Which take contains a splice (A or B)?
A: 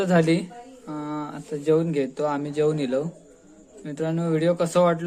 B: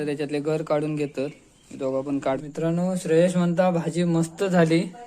B